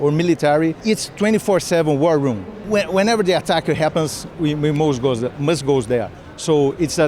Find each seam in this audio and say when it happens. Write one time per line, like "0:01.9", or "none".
0:02.6